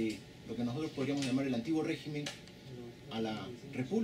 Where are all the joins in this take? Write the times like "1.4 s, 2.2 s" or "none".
2.9 s